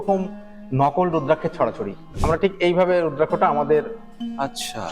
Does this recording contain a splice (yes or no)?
yes